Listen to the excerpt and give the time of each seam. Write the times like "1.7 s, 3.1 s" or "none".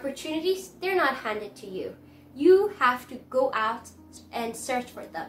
4.1 s

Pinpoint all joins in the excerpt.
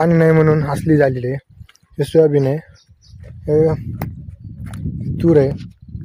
none

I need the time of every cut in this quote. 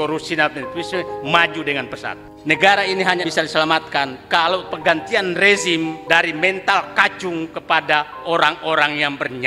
2.3 s, 3.3 s, 6.0 s

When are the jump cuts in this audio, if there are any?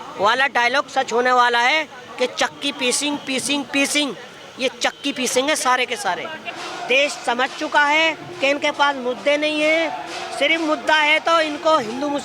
6.4 s

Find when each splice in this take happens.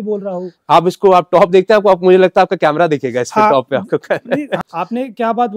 4.6 s

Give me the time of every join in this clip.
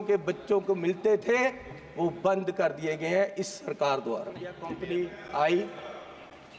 4.7 s

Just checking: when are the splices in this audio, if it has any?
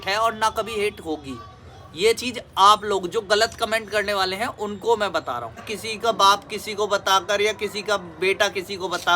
5.7 s

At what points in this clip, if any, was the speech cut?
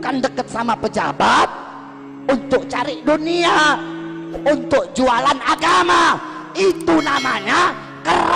none

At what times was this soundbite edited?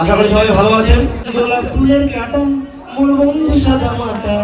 1.3 s

